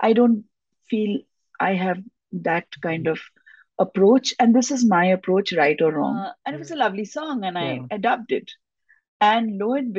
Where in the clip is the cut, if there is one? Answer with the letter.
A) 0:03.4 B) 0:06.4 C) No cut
B